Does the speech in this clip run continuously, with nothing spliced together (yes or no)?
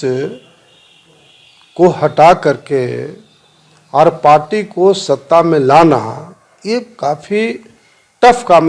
yes